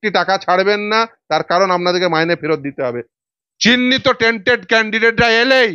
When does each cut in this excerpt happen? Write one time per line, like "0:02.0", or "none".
0:03.1